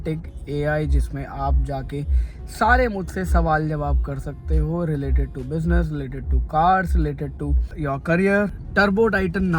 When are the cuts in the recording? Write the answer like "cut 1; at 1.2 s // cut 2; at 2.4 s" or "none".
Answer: cut 1; at 7.7 s // cut 2; at 8.6 s